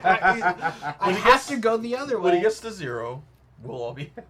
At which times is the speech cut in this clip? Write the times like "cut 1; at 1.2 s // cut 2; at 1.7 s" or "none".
none